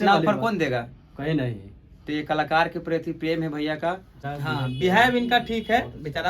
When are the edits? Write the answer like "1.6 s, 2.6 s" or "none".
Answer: 4.2 s